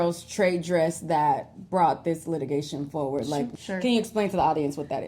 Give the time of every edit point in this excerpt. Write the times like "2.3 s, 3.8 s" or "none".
3.5 s